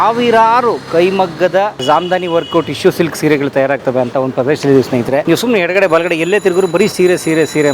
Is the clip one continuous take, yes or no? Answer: no